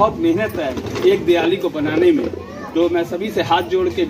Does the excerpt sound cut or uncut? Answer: uncut